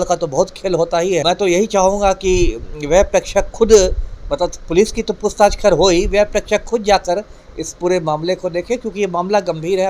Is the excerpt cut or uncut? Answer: cut